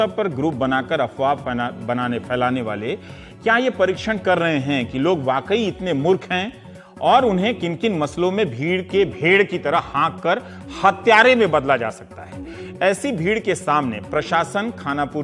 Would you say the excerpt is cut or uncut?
uncut